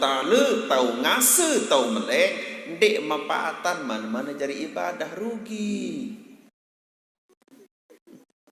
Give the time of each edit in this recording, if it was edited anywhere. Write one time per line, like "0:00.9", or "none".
0:07.3